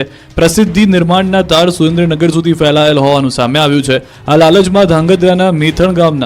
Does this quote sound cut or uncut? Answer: cut